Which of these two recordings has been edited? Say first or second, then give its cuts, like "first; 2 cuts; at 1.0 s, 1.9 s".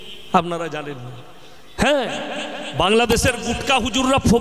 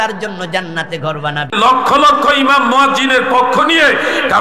second; 1 cut; at 1.5 s